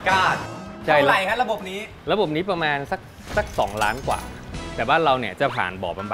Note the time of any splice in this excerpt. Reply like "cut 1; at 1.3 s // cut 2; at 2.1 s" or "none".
cut 1; at 0.8 s // cut 2; at 4.7 s